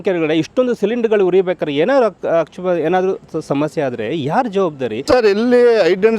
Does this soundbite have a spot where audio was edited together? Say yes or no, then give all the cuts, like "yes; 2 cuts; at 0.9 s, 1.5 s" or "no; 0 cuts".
yes; 1 cut; at 4.9 s